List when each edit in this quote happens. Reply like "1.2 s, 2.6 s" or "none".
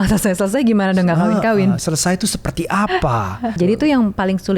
3.6 s